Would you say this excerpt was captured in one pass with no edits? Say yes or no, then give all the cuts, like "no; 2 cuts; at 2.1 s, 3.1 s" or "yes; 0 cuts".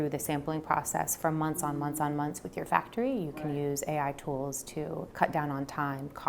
no; 1 cut; at 5.1 s